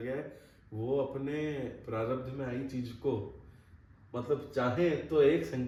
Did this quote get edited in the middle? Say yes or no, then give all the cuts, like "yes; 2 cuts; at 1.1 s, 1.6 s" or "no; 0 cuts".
no; 0 cuts